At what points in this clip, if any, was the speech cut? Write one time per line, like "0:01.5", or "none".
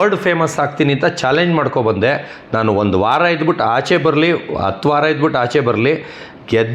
none